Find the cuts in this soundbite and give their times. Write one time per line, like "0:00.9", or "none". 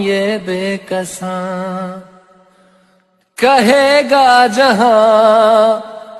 0:03.6